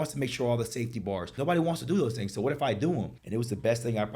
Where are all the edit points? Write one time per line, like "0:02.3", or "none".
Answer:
0:01.4
0:03.2